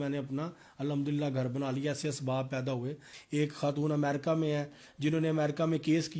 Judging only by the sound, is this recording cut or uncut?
cut